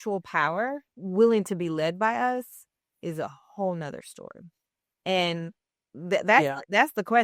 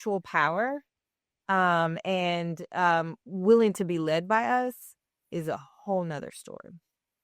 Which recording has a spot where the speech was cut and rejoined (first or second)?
first